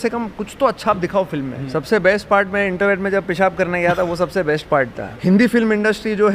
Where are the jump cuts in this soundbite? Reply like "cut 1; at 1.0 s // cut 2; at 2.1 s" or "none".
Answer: cut 1; at 1.6 s // cut 2; at 5.0 s